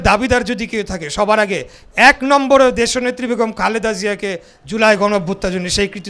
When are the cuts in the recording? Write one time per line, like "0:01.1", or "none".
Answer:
none

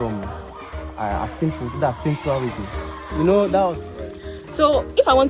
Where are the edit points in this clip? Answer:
0:03.8

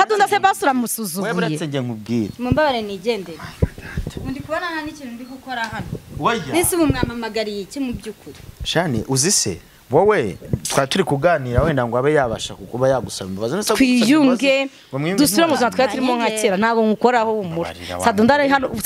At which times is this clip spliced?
none

